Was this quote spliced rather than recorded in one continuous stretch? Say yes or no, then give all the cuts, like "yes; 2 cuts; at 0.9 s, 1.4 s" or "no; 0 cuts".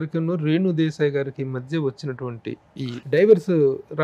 no; 0 cuts